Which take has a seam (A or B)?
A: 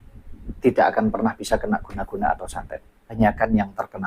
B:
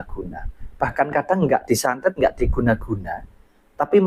A